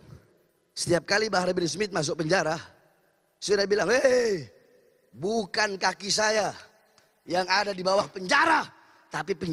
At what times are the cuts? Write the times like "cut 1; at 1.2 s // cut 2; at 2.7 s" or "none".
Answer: none